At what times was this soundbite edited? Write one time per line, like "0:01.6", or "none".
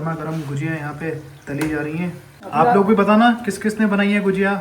0:02.3